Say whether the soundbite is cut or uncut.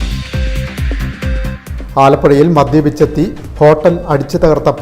uncut